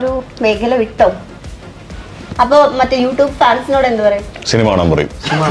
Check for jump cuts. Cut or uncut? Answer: cut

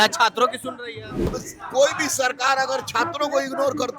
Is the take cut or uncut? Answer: cut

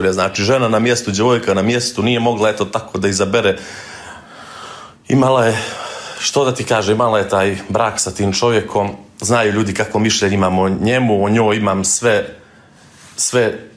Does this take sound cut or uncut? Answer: uncut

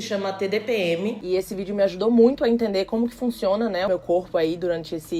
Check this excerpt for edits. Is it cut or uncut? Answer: cut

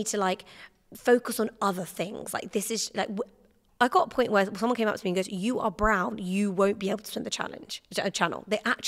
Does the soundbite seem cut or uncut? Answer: uncut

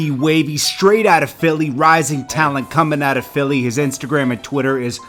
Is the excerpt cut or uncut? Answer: uncut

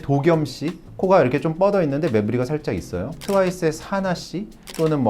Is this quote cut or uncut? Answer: cut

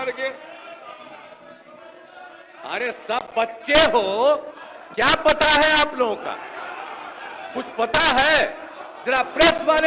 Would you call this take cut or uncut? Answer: uncut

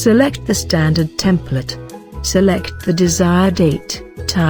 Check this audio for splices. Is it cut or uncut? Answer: uncut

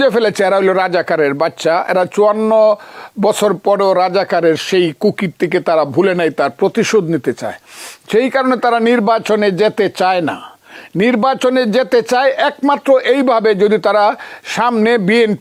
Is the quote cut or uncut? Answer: uncut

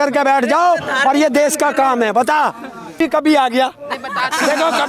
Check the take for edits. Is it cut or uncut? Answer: cut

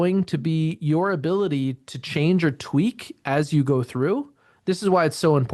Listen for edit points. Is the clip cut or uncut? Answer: uncut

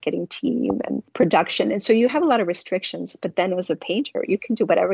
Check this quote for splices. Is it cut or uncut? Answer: cut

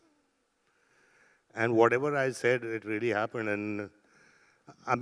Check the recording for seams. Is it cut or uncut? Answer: uncut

